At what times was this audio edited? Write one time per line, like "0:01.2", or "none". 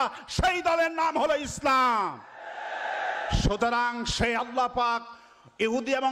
none